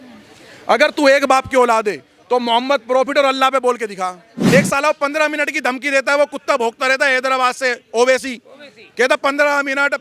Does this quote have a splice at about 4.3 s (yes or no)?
yes